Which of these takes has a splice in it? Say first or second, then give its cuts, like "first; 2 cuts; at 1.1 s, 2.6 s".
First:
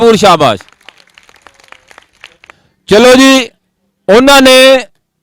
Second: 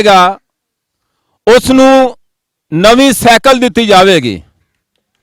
first; 1 cut; at 2.6 s